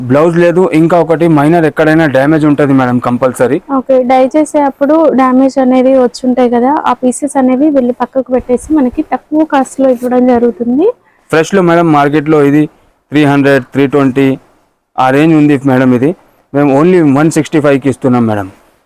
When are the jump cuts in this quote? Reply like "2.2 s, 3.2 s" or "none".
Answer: none

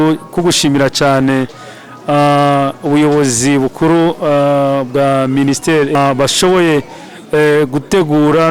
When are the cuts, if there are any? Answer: 5.9 s

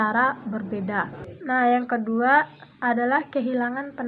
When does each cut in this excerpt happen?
1.2 s

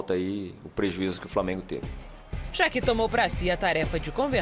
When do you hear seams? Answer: none

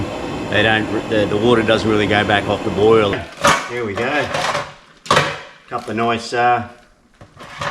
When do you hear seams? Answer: 3.1 s

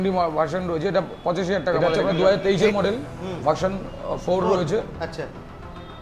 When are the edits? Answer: 1.8 s

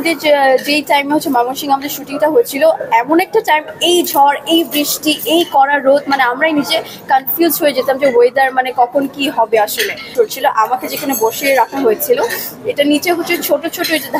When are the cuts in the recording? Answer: 10.0 s

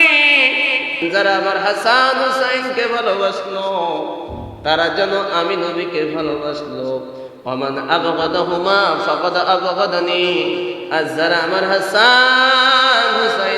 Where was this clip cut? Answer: 1.0 s

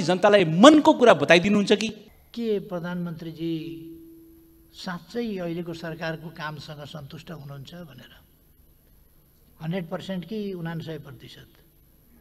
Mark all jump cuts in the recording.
2.0 s

